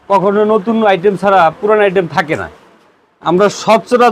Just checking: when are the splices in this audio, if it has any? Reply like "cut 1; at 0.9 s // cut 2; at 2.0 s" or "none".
none